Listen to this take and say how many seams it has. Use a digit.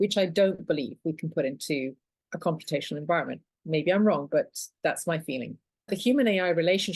1